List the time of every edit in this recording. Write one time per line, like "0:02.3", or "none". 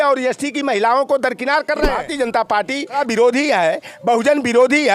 0:02.0
0:03.0